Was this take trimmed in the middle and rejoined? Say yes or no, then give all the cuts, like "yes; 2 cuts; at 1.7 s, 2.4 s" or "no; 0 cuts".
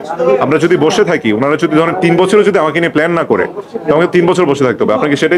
no; 0 cuts